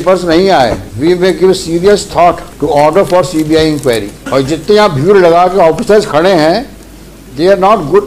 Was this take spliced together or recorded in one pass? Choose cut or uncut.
cut